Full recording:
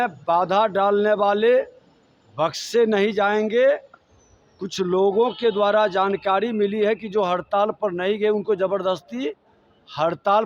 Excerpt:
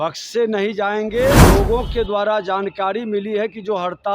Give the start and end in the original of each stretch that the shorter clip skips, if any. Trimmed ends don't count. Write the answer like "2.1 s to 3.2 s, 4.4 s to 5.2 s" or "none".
3.8 s to 4.9 s

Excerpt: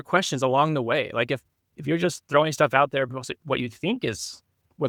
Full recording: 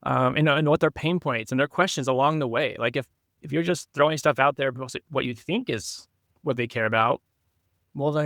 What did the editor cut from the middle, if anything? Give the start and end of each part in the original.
none

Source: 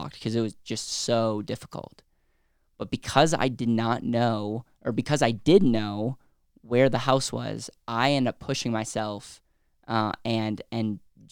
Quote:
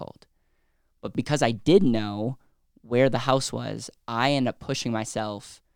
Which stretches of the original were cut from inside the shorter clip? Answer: 2.9 s to 4.9 s

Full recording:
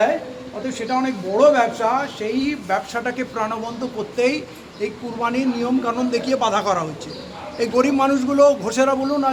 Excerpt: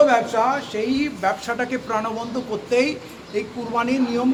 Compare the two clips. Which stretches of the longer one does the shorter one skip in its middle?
none

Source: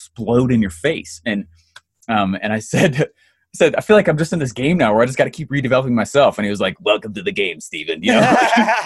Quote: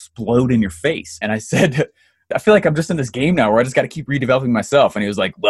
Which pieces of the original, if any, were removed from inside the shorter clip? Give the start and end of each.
1.2 s to 2.4 s, 3.5 s to 3.7 s

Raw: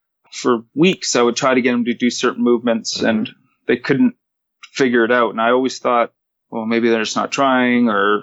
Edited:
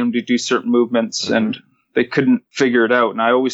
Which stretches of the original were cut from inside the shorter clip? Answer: 4.2 s to 4.7 s

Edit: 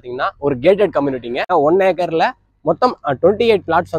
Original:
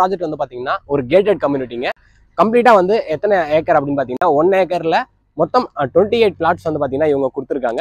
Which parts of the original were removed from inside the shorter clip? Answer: 1.9 s to 4.1 s

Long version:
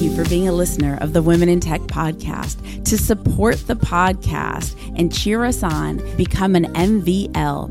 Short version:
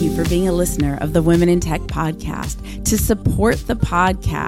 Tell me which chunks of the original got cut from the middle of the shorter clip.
none

